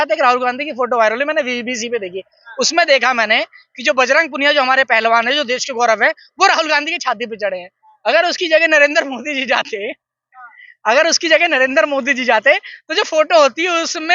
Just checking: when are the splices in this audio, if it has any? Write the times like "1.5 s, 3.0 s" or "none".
none